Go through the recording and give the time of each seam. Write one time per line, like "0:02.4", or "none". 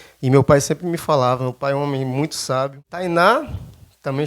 0:02.9